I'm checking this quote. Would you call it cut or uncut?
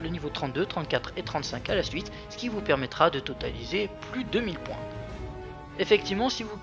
cut